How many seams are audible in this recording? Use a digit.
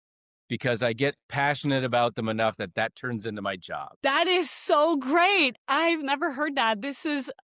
0